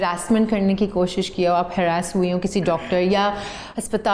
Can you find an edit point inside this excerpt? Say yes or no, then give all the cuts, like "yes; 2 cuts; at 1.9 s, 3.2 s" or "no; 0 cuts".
no; 0 cuts